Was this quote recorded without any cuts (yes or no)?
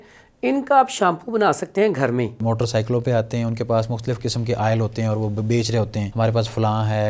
no